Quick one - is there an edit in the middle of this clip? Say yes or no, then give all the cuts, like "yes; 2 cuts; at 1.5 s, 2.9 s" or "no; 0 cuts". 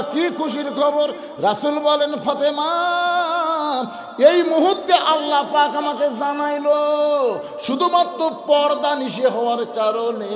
no; 0 cuts